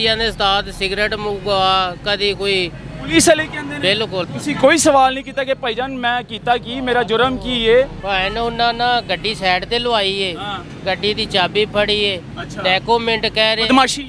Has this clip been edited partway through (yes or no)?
yes